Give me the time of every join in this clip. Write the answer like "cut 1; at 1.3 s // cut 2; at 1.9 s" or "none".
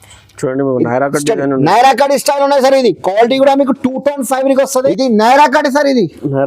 cut 1; at 4.9 s